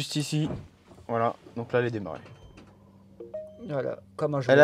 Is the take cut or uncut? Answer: uncut